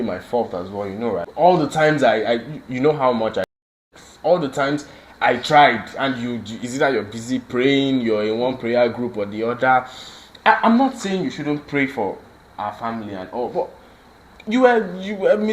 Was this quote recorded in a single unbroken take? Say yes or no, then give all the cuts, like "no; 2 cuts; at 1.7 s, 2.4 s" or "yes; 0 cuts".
no; 1 cut; at 1.3 s